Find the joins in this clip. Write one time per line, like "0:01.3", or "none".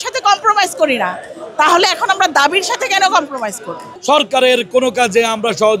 0:03.9